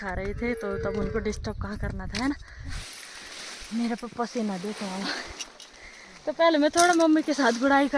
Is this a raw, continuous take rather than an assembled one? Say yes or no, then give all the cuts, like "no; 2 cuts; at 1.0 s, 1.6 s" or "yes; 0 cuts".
no; 1 cut; at 2.8 s